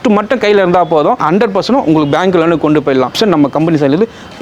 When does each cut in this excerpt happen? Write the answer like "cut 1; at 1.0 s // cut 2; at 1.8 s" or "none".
cut 1; at 1.2 s // cut 2; at 3.2 s